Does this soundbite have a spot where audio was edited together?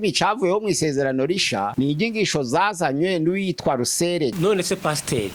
yes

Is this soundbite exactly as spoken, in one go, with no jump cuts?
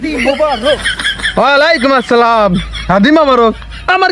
yes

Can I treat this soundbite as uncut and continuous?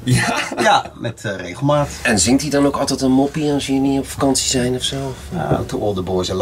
no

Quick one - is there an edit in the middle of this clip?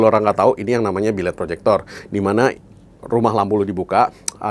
no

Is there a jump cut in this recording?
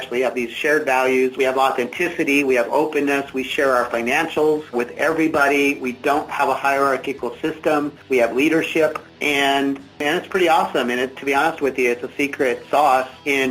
no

